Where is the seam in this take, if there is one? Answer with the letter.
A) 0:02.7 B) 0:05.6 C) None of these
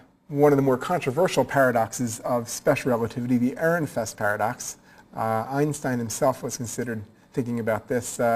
B